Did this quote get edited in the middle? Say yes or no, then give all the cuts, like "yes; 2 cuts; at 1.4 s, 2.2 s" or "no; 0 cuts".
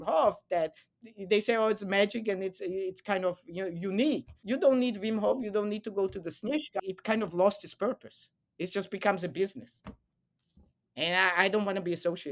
yes; 2 cuts; at 4.3 s, 6.7 s